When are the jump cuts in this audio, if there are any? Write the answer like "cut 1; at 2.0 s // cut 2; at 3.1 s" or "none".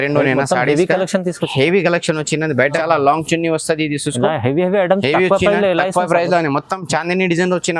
cut 1; at 2.8 s